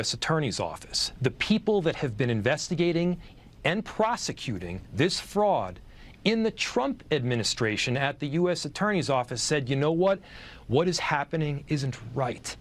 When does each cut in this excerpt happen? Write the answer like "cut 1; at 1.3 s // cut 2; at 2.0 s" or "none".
none